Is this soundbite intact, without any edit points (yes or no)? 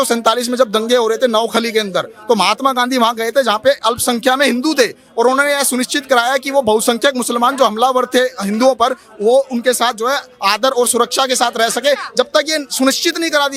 yes